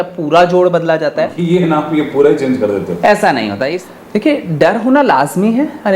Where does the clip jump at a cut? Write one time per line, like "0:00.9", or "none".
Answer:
0:01.4
0:03.7